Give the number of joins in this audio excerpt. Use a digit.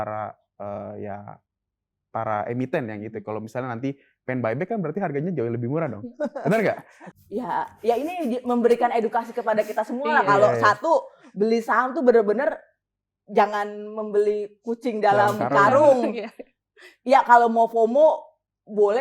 1